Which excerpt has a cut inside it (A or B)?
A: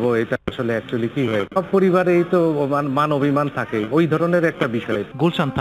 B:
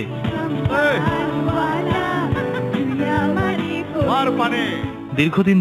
A